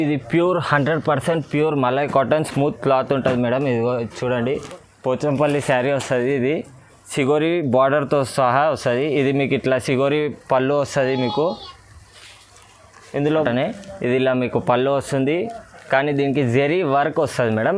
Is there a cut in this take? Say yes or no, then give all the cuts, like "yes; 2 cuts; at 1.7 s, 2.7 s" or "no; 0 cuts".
yes; 2 cuts; at 4.9 s, 13.4 s